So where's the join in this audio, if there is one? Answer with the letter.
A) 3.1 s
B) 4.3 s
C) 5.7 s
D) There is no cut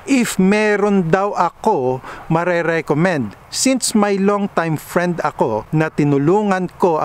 C